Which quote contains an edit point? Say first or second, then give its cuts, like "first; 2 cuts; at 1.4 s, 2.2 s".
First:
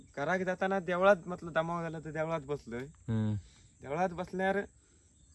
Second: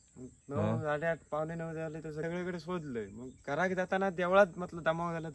second; 1 cut; at 2.2 s